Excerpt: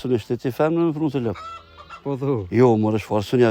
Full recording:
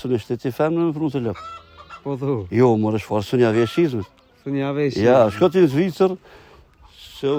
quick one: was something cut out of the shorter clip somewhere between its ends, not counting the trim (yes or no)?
no